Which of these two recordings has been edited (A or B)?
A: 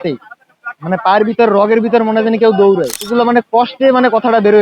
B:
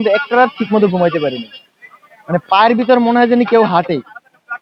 A